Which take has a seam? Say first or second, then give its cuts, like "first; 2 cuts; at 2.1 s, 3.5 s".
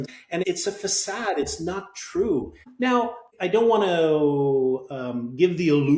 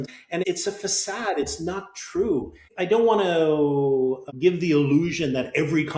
second; 2 cuts; at 2.6 s, 4.3 s